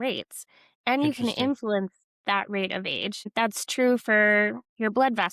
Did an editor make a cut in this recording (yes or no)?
yes